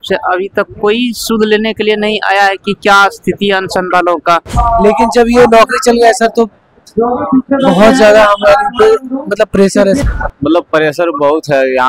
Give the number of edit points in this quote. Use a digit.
2